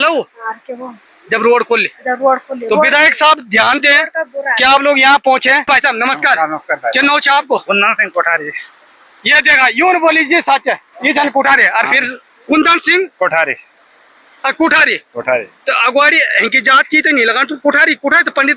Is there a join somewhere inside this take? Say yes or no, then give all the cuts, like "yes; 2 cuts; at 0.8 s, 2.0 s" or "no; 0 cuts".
yes; 1 cut; at 5.7 s